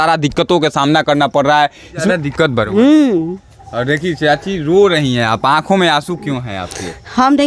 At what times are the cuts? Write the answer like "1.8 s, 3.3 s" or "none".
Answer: 2.1 s